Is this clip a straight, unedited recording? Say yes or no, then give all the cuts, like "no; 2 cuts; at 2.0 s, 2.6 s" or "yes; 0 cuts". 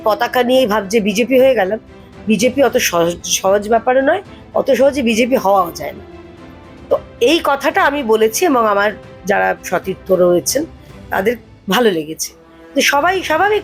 yes; 0 cuts